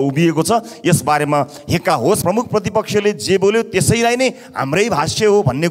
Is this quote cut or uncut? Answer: cut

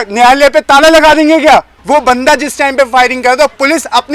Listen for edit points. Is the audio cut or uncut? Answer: cut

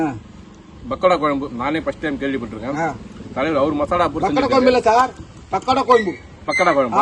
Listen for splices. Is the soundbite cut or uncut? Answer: uncut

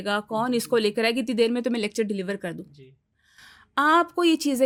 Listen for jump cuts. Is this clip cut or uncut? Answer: uncut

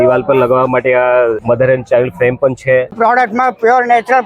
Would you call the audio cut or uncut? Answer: cut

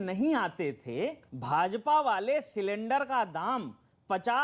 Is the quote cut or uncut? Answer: cut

